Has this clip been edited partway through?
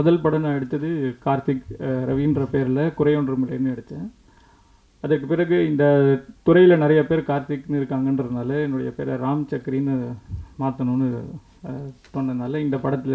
no; 0 cuts

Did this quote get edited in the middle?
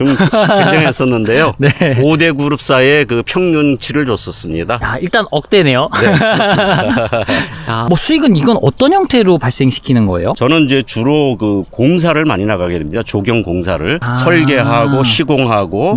yes; 3 cuts; at 4.8 s, 7.8 s, 10.4 s

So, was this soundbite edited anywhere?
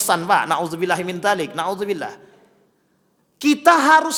no; 0 cuts

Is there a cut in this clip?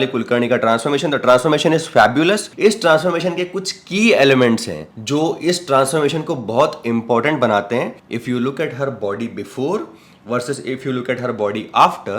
yes; 1 cut; at 8.0 s

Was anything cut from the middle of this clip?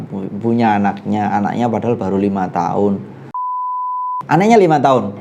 yes; 1 cut; at 3.7 s

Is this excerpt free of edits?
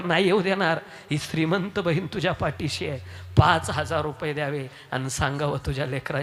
yes; 0 cuts

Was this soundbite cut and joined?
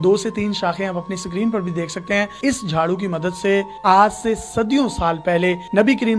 yes; 2 cuts; at 2.4 s, 3.7 s

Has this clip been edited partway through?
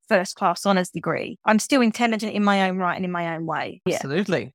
yes; 1 cut; at 1.3 s

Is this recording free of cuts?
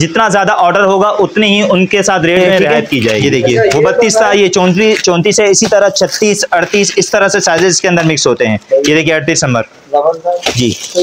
no; 1 cut; at 4.2 s

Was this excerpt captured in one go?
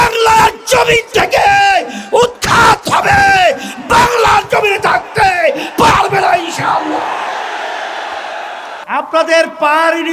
no; 1 cut; at 8.8 s

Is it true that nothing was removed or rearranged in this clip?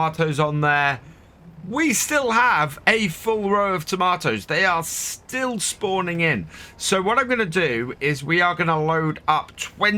yes; 0 cuts

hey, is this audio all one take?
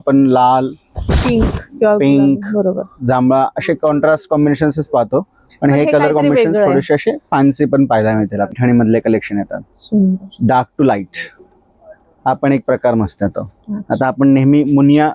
no; 1 cut; at 8.6 s

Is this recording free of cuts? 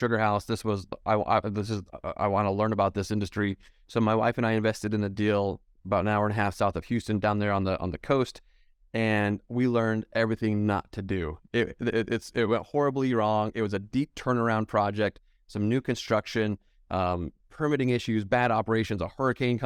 yes; 0 cuts

